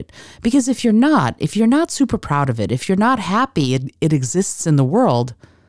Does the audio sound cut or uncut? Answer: uncut